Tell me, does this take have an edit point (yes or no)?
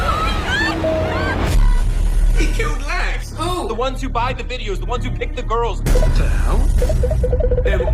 yes